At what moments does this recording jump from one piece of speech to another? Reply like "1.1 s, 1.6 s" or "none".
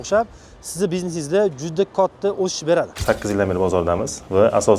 2.9 s